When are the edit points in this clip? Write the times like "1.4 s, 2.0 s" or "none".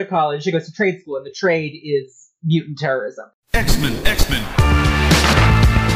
3.1 s